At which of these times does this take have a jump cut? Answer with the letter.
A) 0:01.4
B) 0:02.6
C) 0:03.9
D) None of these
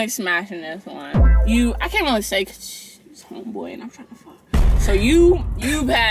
A